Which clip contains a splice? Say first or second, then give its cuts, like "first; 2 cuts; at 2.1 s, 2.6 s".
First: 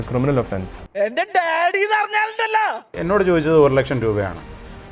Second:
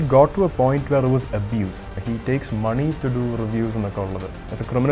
first; 1 cut; at 3.0 s